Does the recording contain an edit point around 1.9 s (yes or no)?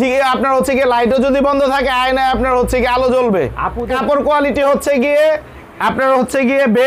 no